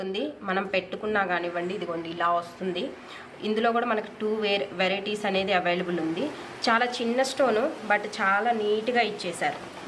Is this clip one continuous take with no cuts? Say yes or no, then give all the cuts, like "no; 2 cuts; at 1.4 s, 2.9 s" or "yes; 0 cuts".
yes; 0 cuts